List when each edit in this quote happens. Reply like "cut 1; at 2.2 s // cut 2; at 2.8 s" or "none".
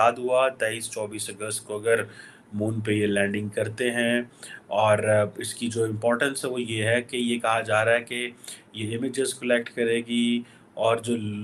none